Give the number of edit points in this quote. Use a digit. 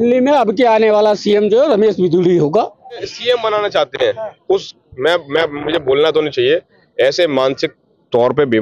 1